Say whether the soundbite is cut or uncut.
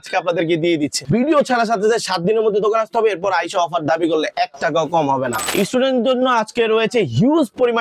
cut